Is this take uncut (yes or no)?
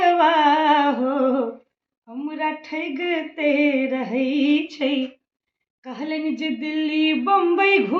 yes